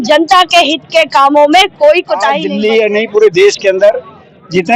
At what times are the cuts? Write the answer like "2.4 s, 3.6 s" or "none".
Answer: 2.4 s